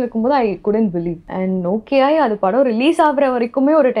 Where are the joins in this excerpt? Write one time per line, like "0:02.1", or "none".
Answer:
0:01.2